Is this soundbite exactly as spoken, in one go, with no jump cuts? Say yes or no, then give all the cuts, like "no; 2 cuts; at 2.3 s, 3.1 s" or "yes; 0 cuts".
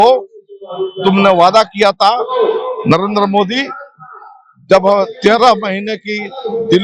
yes; 0 cuts